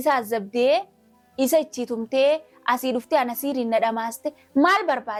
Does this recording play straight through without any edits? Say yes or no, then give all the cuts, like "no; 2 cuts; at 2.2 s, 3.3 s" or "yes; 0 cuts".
yes; 0 cuts